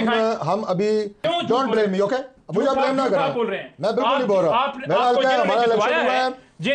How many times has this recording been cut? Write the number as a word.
one